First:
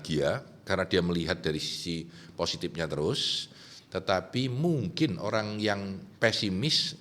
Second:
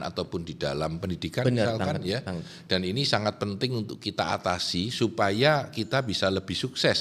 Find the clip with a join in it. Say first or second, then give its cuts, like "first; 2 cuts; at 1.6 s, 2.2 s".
first; 1 cut; at 6.0 s